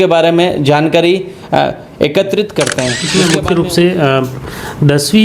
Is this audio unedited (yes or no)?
no